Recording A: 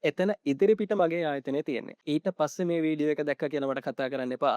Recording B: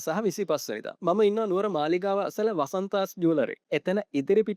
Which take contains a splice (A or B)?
A